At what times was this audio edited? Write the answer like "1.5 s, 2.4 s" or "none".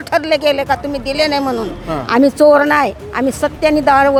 none